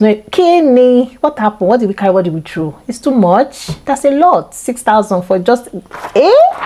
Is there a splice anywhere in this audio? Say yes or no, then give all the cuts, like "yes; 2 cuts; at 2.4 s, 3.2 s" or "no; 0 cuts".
no; 0 cuts